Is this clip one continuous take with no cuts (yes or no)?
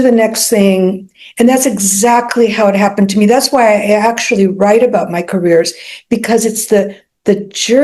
yes